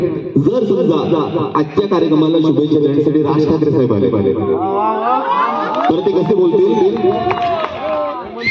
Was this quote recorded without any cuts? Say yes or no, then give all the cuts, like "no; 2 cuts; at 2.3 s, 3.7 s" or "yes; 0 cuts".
yes; 0 cuts